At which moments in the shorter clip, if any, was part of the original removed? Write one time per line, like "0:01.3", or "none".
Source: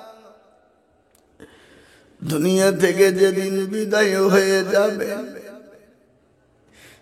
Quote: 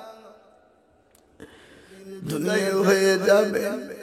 0:02.3

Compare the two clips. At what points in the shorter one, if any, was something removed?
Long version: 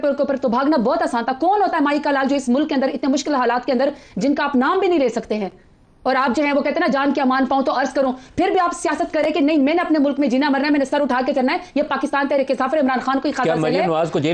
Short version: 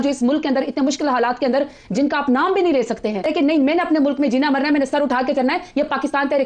0:03.2

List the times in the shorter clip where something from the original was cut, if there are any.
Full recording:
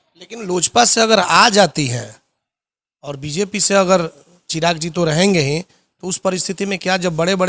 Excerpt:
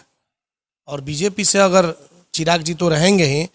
none

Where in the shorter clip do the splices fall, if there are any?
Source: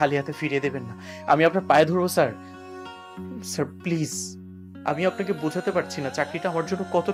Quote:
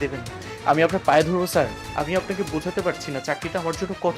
0:01.8

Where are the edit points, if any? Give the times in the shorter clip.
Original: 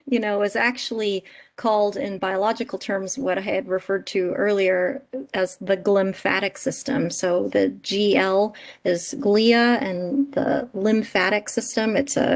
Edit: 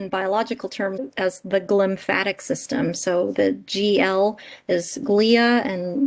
0:01.0

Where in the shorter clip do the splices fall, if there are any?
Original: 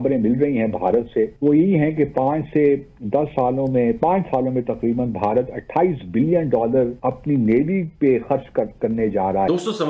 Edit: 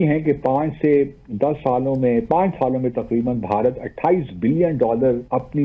none

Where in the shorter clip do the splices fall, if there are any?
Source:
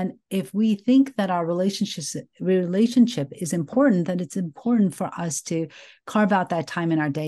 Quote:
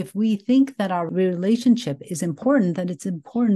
0:01.1

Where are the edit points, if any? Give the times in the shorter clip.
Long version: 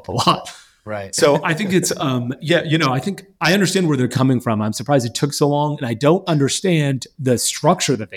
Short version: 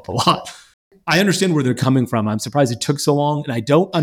0:00.9

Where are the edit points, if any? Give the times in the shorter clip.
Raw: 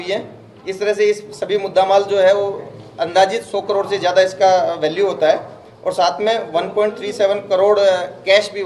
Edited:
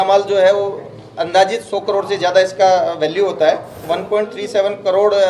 0:03.8

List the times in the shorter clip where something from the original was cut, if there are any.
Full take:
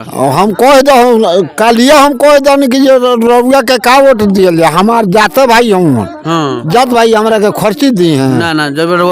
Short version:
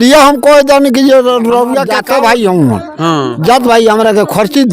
0:01.9

